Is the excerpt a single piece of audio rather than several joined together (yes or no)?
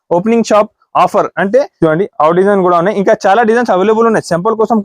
no